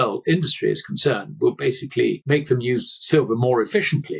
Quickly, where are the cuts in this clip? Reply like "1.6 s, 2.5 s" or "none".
none